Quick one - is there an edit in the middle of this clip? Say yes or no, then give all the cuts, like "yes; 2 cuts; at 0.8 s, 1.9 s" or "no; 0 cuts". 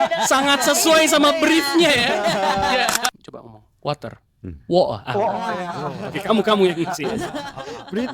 yes; 1 cut; at 3.2 s